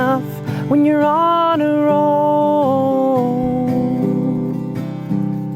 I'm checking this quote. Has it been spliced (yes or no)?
no